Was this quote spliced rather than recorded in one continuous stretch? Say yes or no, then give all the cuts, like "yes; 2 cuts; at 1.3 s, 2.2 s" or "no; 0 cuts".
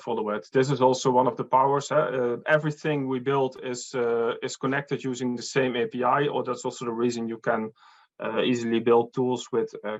no; 0 cuts